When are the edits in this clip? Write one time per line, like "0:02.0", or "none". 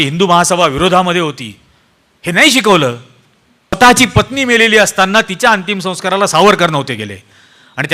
0:03.8